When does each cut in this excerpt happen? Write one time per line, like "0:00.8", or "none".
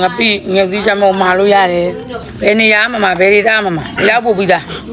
0:02.2
0:03.9

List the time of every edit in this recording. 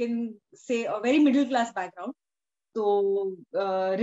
none

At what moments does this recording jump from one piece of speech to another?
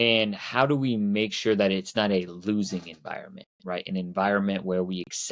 none

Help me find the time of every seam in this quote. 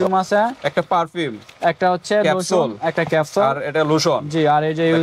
none

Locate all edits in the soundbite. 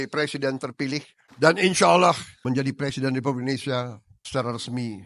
0:01.2
0:02.3

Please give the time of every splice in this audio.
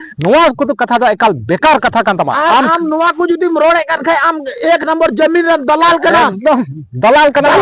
0:02.4

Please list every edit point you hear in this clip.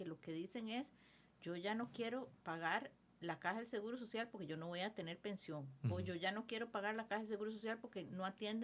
none

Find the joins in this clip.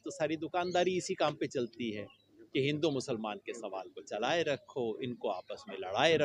none

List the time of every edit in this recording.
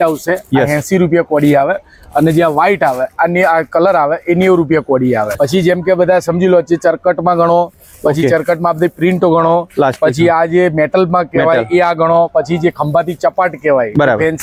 none

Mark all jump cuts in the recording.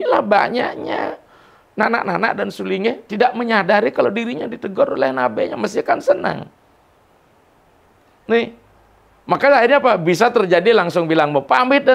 none

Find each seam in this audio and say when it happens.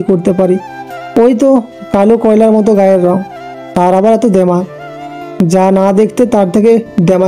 0:05.0

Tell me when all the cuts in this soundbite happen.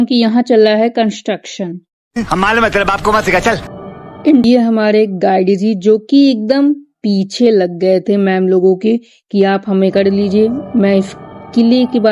0:04.4

